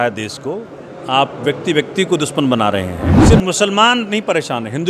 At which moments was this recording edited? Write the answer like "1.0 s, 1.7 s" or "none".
3.2 s